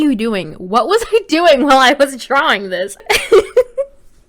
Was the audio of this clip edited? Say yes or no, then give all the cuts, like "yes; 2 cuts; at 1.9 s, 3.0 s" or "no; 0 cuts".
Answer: yes; 1 cut; at 3.0 s